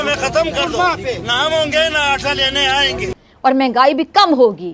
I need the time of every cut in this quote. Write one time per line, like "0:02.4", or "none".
0:03.1